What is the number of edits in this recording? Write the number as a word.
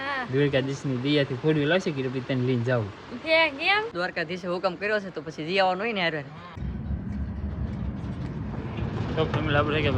two